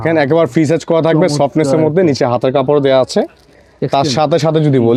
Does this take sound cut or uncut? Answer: uncut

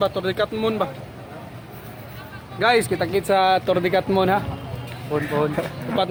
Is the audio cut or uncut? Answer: uncut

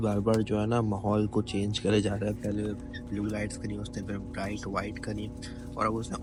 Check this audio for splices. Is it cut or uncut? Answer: uncut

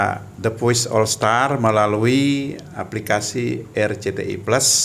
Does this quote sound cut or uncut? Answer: uncut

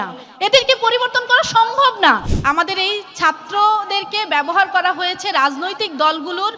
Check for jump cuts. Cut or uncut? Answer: cut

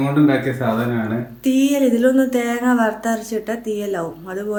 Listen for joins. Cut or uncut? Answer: uncut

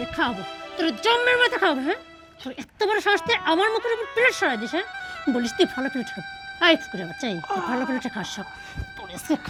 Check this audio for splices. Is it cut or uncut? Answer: uncut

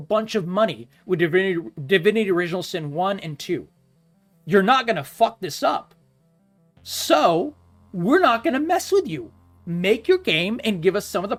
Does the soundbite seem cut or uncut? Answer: uncut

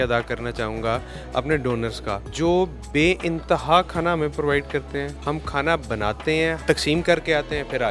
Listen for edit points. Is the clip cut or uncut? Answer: cut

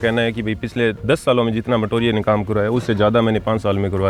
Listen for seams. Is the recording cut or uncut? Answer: uncut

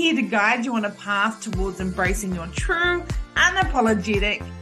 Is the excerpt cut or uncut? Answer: uncut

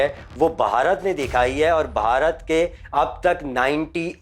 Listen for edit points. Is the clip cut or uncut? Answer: uncut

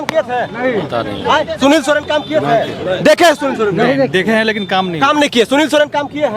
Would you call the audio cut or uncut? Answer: uncut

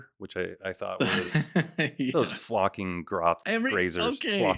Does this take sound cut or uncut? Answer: cut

